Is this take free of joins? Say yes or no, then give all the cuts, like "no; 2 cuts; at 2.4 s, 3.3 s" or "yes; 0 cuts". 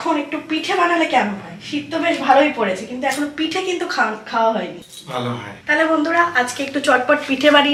yes; 0 cuts